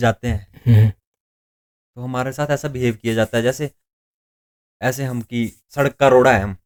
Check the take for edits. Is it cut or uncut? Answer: uncut